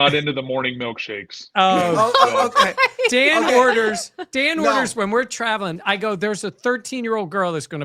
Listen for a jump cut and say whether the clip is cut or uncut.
uncut